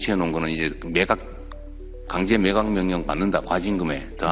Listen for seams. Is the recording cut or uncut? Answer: uncut